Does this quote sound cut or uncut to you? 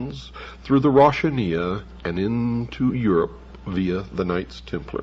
uncut